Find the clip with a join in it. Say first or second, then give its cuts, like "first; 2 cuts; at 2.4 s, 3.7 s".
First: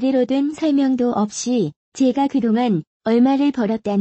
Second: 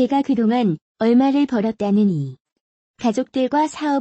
second; 1 cut; at 3.0 s